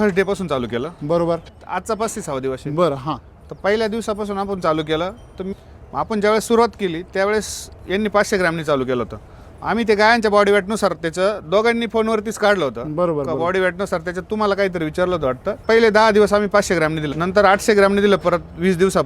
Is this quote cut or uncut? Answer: cut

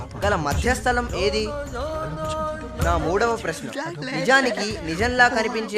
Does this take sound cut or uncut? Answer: uncut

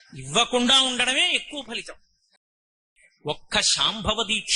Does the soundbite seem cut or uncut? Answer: cut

